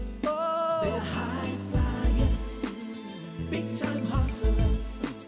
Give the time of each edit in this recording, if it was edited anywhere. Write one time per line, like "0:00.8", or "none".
none